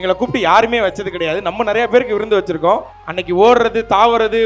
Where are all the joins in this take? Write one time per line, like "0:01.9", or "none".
0:02.9